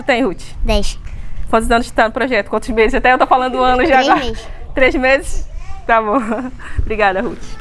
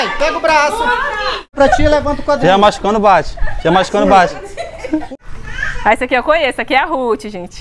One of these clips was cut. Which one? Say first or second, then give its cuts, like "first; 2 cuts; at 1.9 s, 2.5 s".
second; 2 cuts; at 1.5 s, 5.1 s